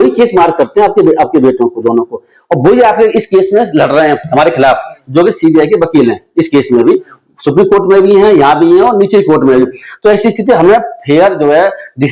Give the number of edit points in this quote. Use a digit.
0